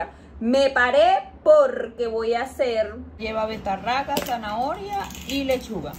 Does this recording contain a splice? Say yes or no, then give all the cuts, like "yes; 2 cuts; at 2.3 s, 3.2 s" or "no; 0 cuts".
yes; 1 cut; at 3.2 s